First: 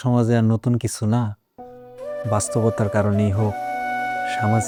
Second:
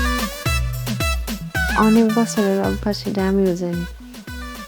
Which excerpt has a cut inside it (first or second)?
second